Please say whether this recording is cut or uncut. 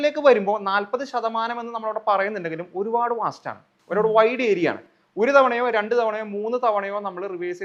uncut